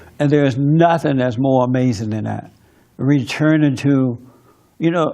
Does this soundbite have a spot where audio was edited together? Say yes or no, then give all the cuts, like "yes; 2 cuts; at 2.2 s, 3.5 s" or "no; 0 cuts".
yes; 1 cut; at 2.3 s